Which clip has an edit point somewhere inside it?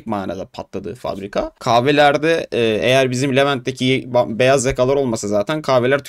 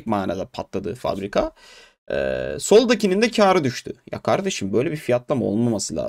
first; 1 cut; at 1.5 s

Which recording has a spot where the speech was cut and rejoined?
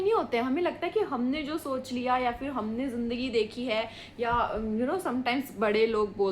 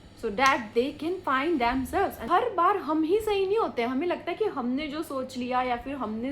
second; 1 cut; at 2.2 s

